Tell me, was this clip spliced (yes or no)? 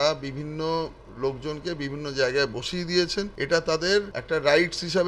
yes